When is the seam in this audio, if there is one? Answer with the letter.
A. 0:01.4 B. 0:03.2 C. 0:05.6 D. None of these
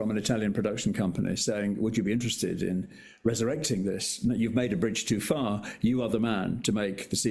D